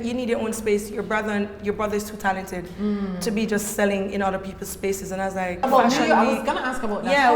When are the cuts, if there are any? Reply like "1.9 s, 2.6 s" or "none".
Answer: 5.6 s